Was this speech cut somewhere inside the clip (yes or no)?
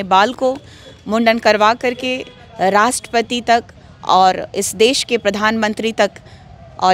no